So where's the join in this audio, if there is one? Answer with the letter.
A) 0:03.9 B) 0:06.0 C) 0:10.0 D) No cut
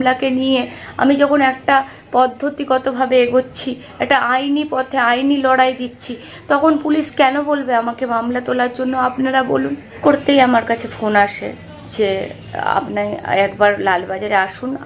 C